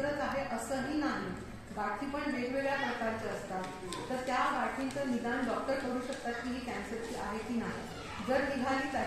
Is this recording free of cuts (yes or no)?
yes